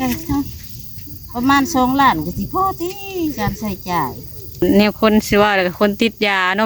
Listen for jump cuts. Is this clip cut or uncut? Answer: cut